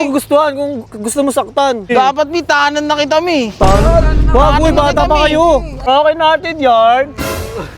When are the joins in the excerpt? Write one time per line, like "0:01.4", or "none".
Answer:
0:01.9
0:05.9